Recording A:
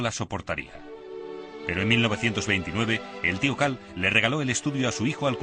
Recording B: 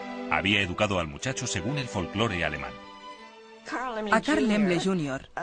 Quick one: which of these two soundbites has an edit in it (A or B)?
A